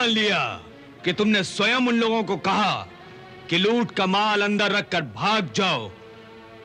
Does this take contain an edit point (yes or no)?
no